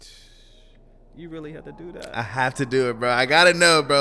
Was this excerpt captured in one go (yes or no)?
yes